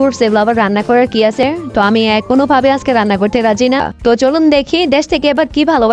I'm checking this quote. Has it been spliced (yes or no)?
yes